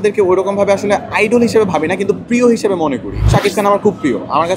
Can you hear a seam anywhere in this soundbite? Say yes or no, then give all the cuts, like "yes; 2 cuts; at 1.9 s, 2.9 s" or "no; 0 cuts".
yes; 1 cut; at 3.3 s